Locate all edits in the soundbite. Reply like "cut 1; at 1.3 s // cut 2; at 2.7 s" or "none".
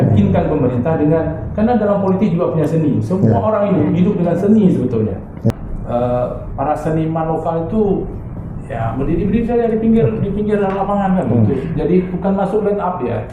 cut 1; at 5.5 s